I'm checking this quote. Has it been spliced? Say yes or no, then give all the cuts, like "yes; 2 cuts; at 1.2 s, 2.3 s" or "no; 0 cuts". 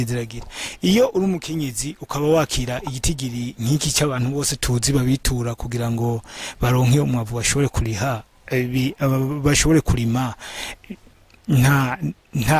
no; 0 cuts